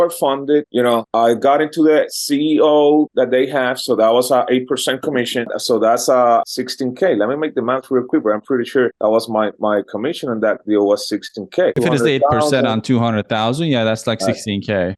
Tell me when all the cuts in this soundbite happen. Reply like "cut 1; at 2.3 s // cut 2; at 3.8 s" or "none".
cut 1; at 6.4 s // cut 2; at 11.7 s